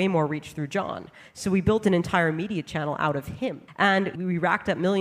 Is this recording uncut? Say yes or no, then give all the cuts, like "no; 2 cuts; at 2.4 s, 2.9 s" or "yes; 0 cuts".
no; 1 cut; at 4.1 s